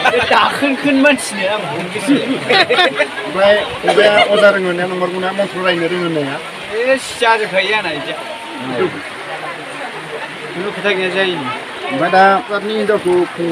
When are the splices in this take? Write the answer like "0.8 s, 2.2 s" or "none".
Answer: 12.5 s

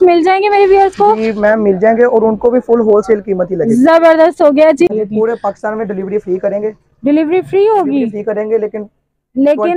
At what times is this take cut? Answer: 4.9 s

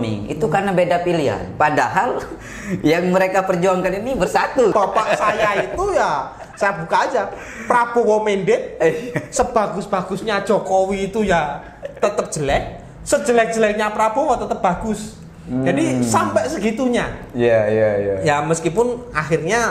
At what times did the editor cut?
4.7 s

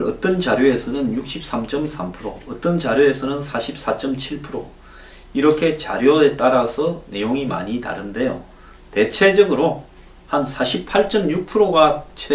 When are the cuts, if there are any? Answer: 5.1 s

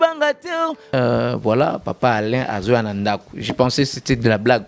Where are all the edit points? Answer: 0.9 s

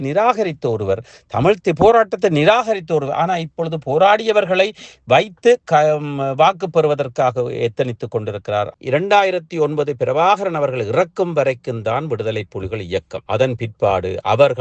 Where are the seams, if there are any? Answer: 8.7 s, 13.2 s

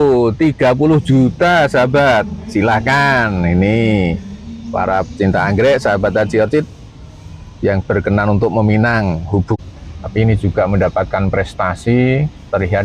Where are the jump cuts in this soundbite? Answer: 9.6 s

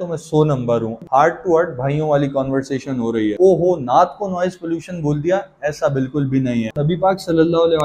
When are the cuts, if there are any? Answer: 1.0 s, 3.3 s, 6.7 s

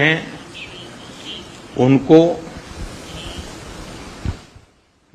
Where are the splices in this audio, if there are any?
none

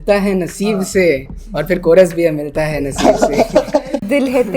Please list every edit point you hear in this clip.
none

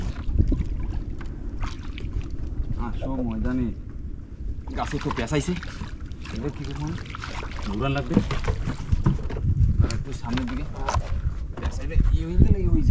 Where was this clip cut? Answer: none

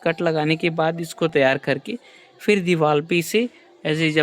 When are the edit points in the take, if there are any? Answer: none

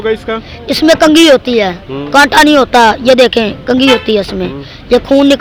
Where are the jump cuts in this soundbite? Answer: none

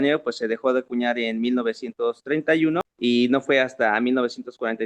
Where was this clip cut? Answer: 2.9 s

